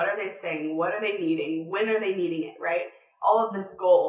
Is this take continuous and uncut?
yes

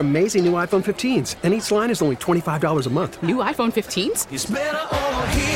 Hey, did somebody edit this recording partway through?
no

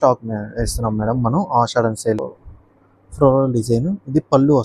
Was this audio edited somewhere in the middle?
yes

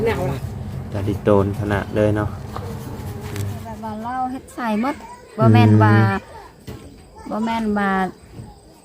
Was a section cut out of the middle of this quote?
yes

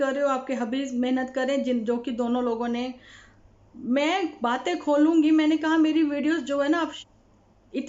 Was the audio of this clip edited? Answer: yes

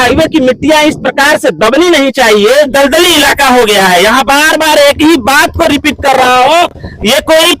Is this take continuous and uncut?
no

